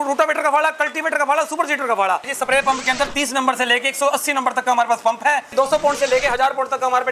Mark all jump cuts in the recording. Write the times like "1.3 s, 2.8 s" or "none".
2.3 s, 5.5 s